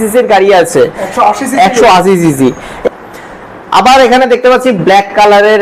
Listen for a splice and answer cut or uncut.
cut